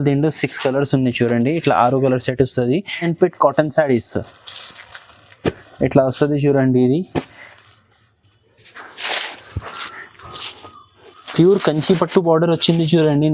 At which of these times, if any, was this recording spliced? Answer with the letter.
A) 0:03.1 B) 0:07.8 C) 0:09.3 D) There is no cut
A